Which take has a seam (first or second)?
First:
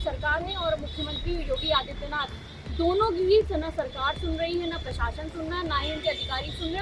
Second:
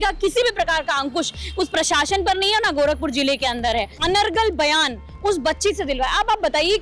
second